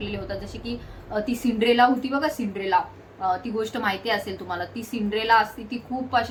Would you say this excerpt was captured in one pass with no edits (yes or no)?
yes